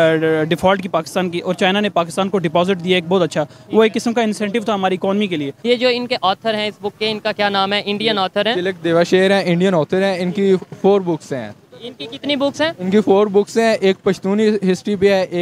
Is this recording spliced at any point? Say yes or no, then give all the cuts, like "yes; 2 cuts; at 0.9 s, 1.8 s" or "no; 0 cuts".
yes; 1 cut; at 5.5 s